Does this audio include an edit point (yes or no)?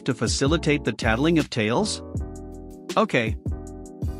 yes